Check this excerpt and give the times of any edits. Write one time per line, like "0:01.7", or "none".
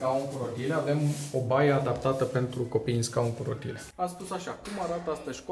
0:03.8

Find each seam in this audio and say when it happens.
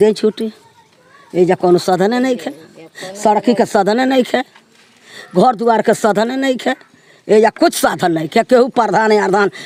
none

